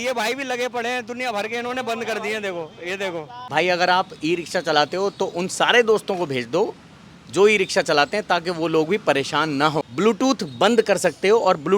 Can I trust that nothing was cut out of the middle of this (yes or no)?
no